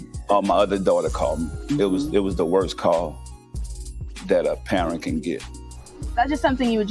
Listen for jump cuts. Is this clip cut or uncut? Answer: cut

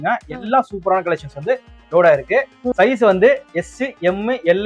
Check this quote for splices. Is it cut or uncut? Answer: cut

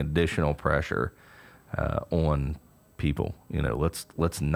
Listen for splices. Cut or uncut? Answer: uncut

